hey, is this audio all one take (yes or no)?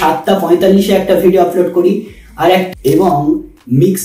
no